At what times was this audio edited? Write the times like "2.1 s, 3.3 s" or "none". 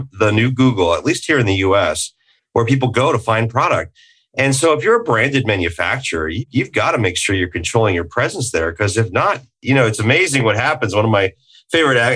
6.4 s